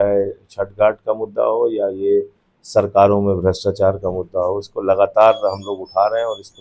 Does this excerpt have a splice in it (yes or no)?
no